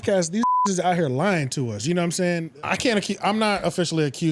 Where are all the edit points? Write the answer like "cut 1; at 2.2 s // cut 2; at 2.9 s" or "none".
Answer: cut 1; at 2.5 s